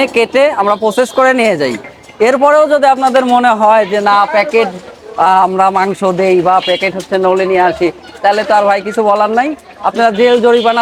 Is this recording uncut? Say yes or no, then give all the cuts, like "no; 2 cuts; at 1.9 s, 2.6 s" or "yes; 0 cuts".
yes; 0 cuts